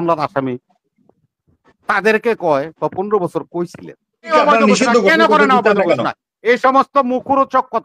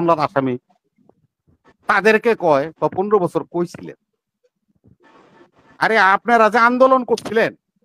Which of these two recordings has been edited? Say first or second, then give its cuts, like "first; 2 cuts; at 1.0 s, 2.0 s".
first; 1 cut; at 4.3 s